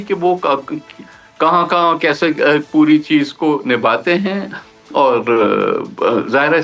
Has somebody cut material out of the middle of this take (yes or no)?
no